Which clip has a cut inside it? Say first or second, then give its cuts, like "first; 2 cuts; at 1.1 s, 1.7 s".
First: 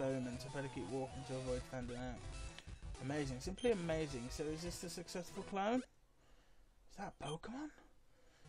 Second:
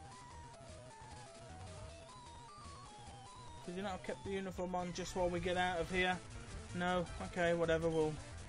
first; 1 cut; at 5.3 s